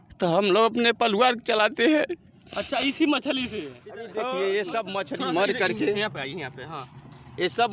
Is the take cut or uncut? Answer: cut